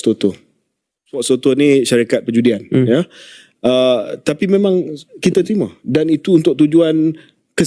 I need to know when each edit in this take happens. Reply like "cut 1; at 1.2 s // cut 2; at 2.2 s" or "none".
cut 1; at 1.1 s